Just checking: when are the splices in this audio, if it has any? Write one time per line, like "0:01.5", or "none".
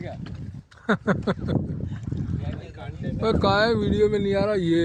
none